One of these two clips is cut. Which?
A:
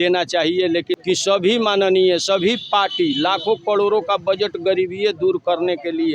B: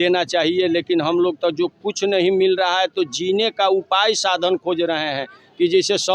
A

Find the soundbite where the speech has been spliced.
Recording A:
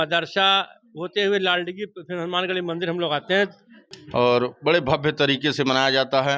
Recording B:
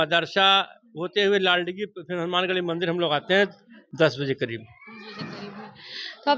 A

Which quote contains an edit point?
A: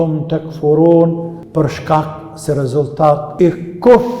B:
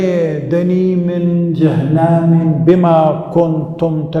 A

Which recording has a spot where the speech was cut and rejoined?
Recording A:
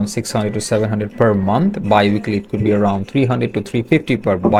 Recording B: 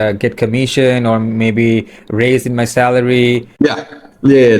B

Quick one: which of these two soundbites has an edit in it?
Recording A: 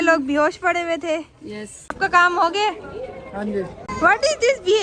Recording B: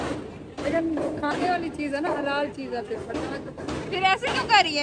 A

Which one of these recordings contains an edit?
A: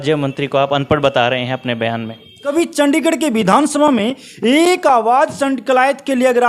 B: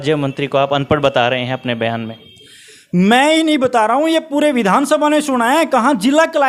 A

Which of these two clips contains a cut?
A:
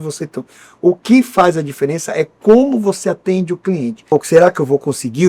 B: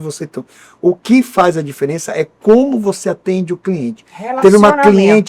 A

